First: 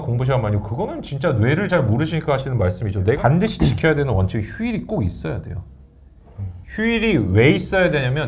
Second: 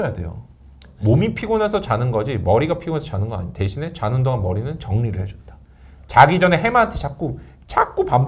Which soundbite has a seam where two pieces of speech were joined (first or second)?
first